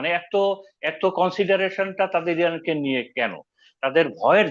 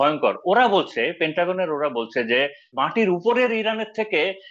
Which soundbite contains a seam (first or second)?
second